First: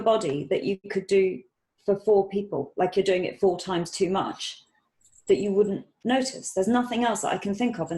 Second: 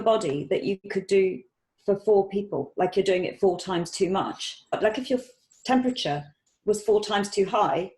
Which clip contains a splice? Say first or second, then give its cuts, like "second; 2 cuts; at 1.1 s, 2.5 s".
second; 1 cut; at 4.8 s